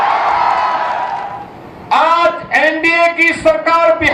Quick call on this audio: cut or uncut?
cut